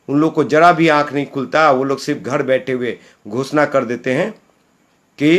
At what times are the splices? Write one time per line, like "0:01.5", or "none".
none

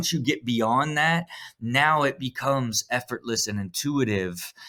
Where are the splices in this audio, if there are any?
none

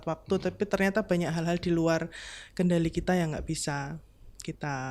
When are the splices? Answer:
none

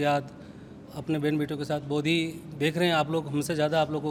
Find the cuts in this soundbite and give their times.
none

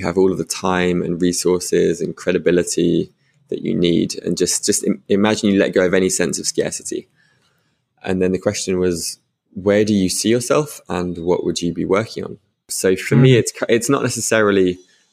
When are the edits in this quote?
0:12.7

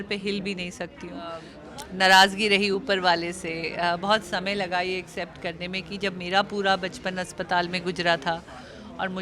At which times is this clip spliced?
0:01.5

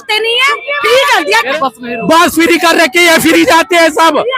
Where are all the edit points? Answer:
0:01.5

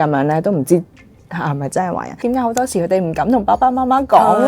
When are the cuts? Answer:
0:02.2

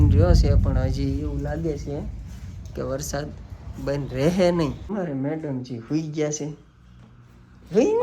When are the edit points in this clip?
0:04.8

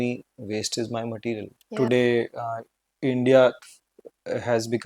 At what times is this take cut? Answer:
0:01.6

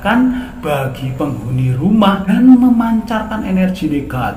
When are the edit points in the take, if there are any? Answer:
0:02.2

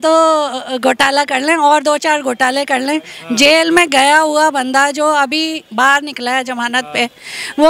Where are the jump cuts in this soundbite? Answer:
none

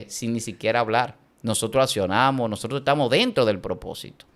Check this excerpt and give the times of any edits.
0:01.2

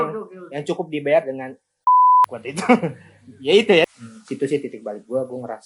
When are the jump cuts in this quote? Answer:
0:03.9

